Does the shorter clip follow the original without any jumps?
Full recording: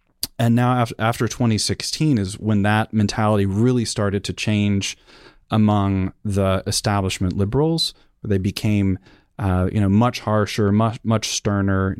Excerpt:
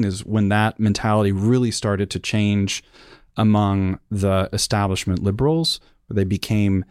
yes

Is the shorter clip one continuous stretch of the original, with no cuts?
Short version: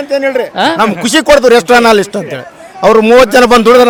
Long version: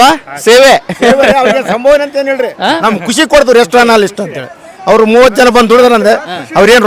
yes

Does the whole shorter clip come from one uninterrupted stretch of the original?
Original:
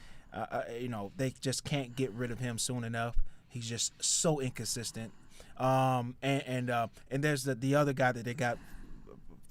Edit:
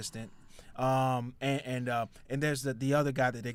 yes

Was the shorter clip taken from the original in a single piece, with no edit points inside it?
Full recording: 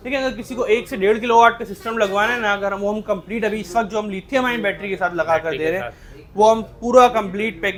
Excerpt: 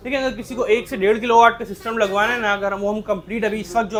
yes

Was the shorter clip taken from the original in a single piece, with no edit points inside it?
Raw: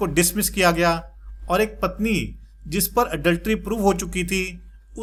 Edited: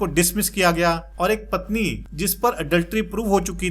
no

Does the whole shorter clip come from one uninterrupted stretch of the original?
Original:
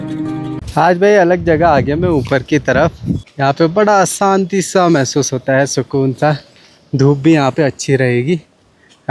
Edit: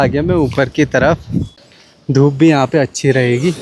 no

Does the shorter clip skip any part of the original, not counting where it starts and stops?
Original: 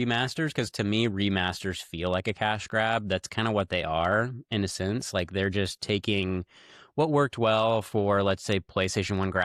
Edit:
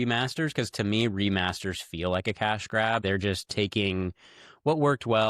yes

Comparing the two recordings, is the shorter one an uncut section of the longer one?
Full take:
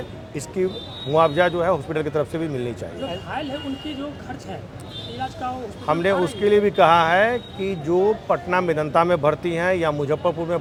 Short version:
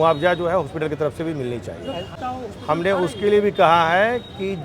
no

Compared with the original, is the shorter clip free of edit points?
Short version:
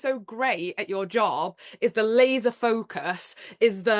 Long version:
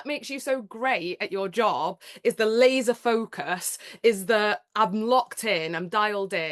yes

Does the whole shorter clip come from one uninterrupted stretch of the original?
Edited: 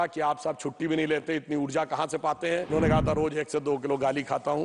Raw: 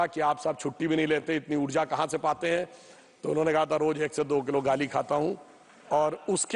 no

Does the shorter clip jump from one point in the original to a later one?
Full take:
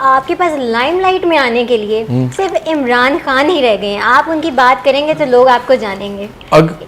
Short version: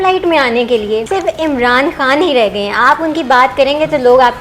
yes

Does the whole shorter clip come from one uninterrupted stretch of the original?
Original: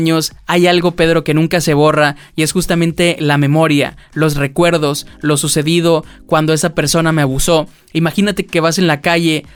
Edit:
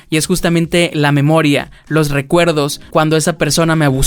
no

